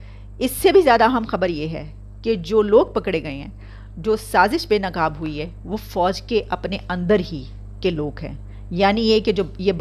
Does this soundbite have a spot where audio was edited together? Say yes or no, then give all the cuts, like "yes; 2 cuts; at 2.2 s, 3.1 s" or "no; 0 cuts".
no; 0 cuts